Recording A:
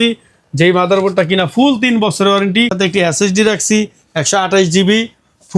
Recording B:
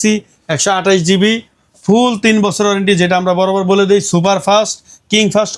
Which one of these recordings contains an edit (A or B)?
A